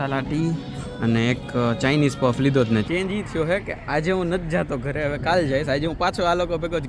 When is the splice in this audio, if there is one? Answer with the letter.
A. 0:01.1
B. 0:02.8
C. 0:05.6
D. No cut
B